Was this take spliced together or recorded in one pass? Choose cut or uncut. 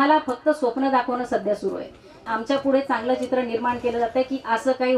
cut